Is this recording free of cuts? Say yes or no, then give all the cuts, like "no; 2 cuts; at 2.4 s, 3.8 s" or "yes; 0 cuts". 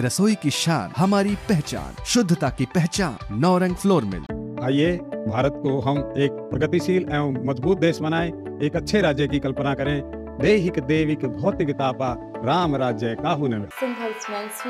no; 1 cut; at 13.7 s